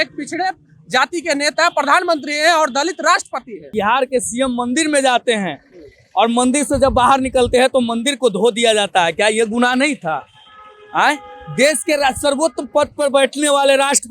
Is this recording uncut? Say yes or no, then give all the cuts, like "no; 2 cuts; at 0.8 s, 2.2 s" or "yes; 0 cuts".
no; 1 cut; at 3.7 s